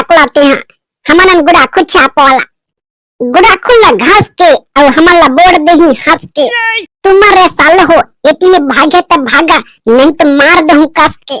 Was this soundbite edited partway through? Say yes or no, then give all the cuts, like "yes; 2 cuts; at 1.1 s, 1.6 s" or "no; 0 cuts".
no; 0 cuts